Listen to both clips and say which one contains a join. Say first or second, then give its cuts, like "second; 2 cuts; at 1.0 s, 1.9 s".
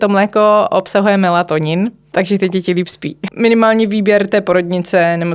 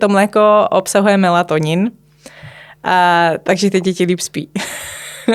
first; 2 cuts; at 2.1 s, 3.3 s